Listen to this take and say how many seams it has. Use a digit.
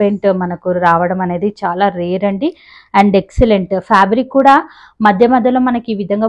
0